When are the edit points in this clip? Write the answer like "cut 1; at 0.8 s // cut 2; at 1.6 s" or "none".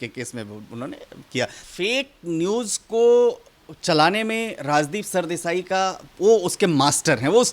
cut 1; at 1.6 s